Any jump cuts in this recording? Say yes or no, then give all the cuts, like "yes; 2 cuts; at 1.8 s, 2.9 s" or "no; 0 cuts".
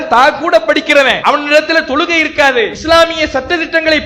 yes; 2 cuts; at 1.2 s, 2.8 s